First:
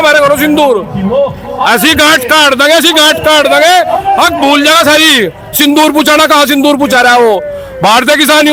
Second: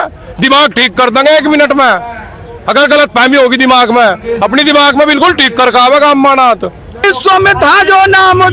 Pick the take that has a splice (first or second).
second